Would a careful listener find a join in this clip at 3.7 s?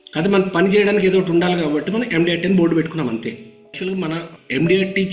yes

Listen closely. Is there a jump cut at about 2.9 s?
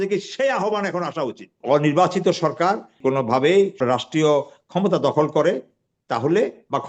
yes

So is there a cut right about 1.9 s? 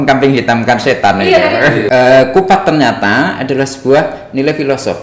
yes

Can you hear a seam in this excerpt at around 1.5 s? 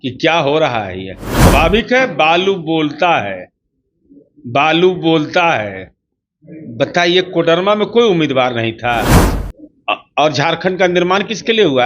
yes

